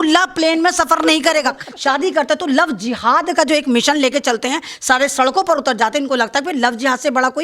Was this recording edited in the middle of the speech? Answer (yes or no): yes